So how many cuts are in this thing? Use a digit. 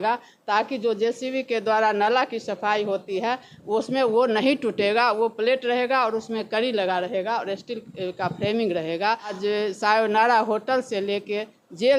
1